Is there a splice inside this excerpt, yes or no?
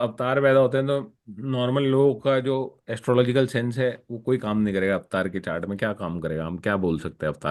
no